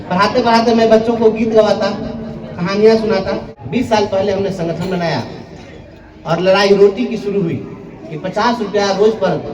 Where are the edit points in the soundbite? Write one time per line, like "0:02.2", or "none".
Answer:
0:03.5